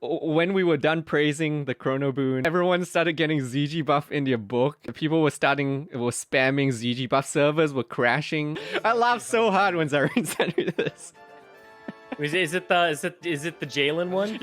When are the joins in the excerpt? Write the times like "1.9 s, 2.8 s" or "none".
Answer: 2.4 s, 4.9 s, 8.6 s